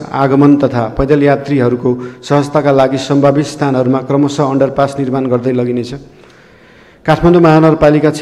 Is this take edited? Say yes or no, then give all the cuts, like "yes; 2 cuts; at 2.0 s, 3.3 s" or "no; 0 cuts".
no; 0 cuts